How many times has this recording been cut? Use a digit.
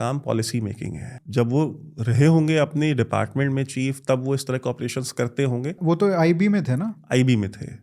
2